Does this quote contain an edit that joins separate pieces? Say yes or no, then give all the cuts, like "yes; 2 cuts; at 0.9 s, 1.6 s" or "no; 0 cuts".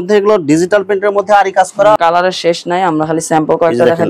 yes; 1 cut; at 2.0 s